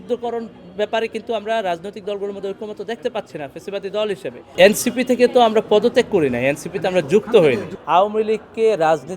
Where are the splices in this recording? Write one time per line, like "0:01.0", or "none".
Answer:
0:04.4
0:07.7